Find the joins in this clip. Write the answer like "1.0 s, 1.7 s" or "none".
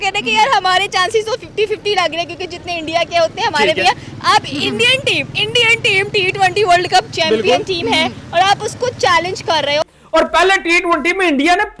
none